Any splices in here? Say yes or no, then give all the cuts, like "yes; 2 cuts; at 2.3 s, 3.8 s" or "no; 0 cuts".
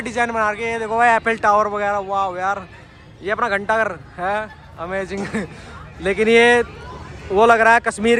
no; 0 cuts